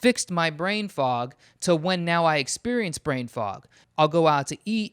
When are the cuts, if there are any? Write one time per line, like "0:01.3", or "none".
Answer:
0:03.8